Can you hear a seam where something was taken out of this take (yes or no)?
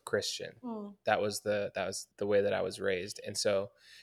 yes